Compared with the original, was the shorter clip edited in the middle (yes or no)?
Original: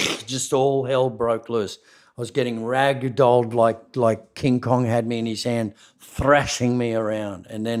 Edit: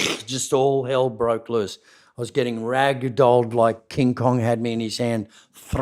yes